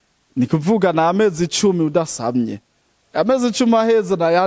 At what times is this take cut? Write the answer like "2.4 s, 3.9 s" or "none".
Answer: none